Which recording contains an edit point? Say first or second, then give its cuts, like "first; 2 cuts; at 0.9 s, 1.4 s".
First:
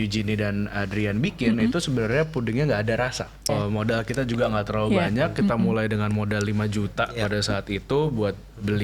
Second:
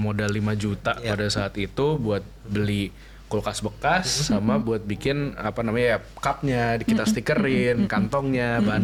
first; 1 cut; at 3.5 s